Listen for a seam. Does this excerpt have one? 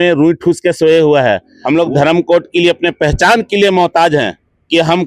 yes; 1 cut; at 1.5 s

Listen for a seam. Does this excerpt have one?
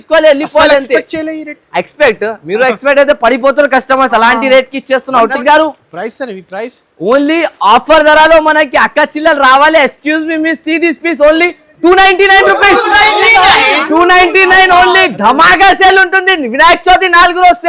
yes; 1 cut; at 5.3 s

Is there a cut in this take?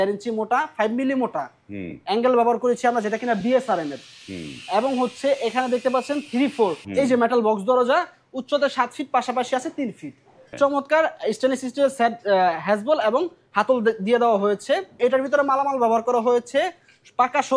yes; 3 cuts; at 6.8 s, 10.5 s, 15.0 s

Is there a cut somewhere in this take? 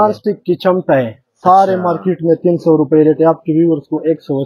no; 0 cuts

